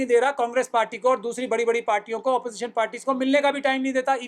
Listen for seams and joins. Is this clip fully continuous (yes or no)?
yes